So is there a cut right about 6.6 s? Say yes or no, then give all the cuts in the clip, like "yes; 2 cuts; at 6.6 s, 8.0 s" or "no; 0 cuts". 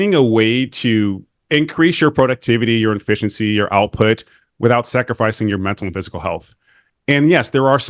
no; 0 cuts